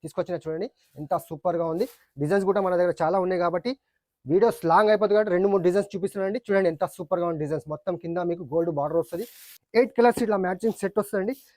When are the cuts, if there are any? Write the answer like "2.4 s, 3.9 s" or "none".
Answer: 9.5 s